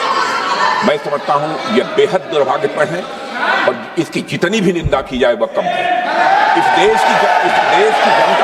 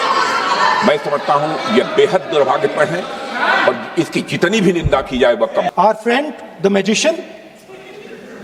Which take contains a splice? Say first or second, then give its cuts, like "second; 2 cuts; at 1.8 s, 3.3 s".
second; 1 cut; at 5.7 s